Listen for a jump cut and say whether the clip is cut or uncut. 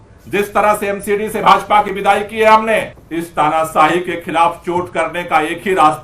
cut